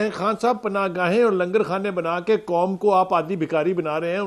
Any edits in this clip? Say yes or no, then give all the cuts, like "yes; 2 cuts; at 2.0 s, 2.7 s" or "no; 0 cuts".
no; 0 cuts